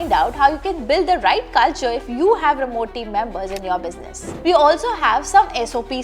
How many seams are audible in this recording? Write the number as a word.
one